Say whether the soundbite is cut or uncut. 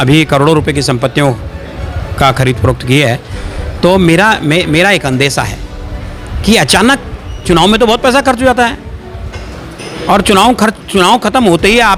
uncut